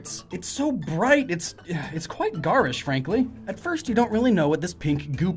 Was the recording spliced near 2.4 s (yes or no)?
yes